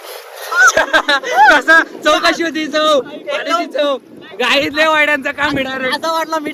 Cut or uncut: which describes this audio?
uncut